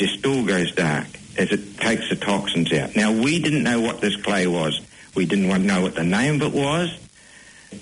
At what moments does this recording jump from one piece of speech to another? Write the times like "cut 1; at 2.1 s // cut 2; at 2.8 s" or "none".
none